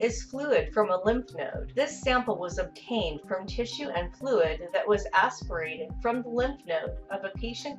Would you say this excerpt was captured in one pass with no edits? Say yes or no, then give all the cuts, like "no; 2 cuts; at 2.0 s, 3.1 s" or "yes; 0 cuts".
no; 1 cut; at 1.6 s